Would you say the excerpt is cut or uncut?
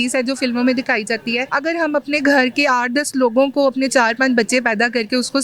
cut